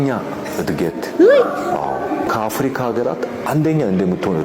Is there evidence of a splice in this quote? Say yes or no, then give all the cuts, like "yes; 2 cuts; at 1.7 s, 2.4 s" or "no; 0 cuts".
yes; 1 cut; at 2.3 s